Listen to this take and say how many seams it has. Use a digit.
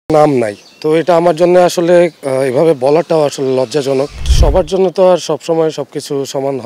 1